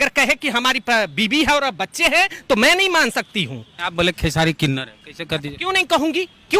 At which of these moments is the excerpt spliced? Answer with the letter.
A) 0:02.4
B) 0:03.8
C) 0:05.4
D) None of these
B